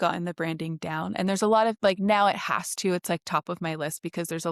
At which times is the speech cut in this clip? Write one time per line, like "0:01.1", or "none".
none